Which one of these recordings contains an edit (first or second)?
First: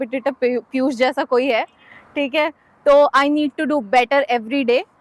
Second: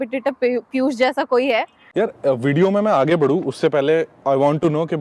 second